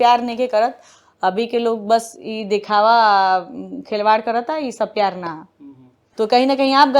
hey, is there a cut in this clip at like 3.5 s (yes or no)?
no